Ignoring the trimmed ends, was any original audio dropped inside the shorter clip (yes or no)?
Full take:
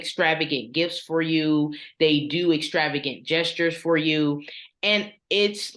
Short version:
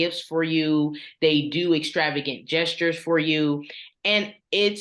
no